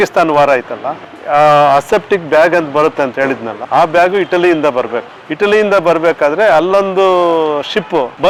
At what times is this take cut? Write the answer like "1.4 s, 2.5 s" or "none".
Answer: none